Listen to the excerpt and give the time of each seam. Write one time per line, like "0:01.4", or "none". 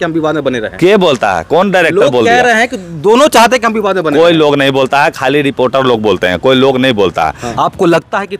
0:07.4